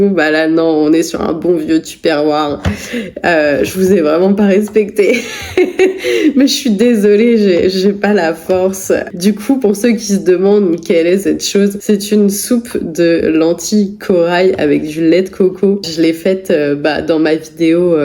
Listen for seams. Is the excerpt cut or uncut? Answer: uncut